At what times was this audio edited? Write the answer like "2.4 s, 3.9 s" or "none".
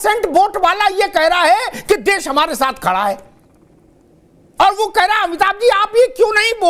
none